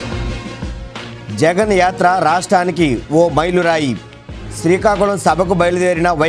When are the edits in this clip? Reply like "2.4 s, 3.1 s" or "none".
1.1 s